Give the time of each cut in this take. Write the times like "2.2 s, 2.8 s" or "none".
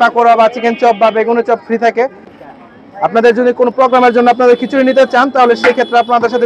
2.2 s